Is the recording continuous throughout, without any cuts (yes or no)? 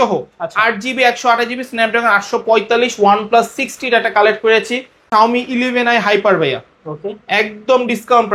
no